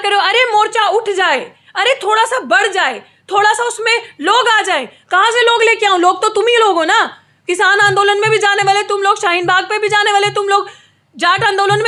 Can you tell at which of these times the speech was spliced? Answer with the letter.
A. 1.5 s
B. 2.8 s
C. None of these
C